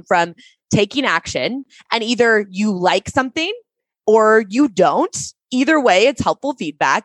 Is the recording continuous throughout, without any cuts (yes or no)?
yes